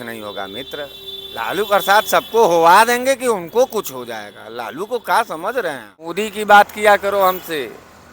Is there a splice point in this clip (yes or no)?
yes